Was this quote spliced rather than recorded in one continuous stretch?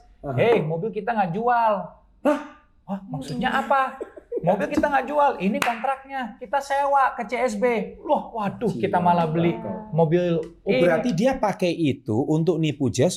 no; 0 cuts

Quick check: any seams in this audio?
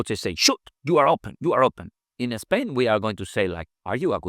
yes; 1 cut; at 1.3 s

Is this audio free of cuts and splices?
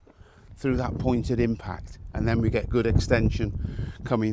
yes; 0 cuts

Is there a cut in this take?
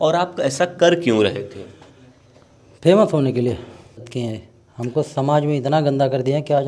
yes; 1 cut; at 4.1 s

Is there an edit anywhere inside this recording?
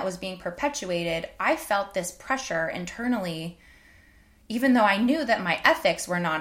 no; 0 cuts

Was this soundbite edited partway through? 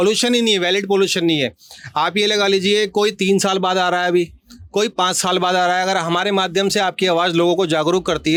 no; 0 cuts

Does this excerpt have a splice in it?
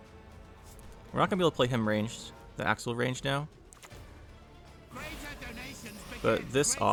no; 0 cuts

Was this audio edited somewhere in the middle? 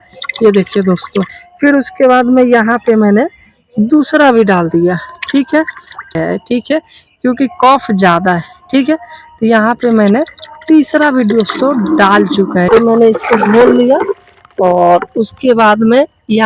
yes; 3 cuts; at 1.4 s, 6.1 s, 12.7 s

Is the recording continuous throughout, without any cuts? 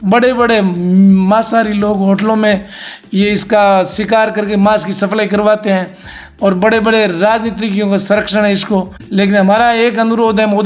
no; 1 cut; at 9.0 s

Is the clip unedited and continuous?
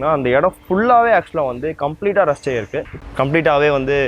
no; 1 cut; at 2.9 s

